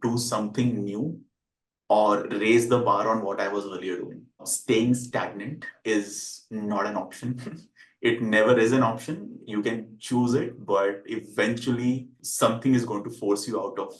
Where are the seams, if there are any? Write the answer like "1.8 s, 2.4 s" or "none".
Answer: none